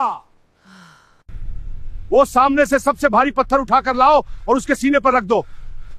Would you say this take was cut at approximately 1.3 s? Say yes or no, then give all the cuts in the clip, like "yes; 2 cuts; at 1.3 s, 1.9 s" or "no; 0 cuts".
yes; 1 cut; at 1.3 s